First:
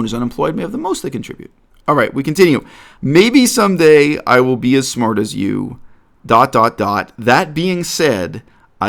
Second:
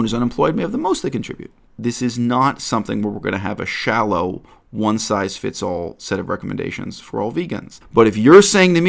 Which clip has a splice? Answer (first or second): second